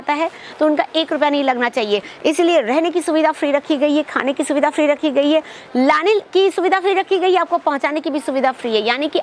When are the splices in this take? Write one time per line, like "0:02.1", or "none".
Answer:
none

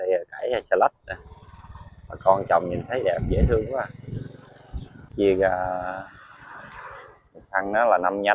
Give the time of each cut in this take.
0:05.1

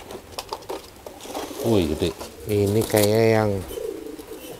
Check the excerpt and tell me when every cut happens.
0:02.3

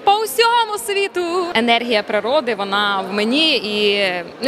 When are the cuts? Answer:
0:01.5

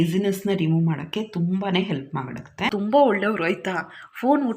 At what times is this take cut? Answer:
0:02.7

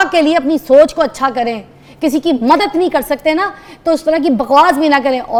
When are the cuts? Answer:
none

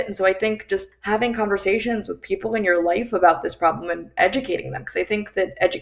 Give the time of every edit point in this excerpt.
0:00.9

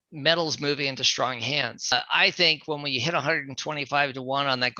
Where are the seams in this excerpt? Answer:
0:01.9

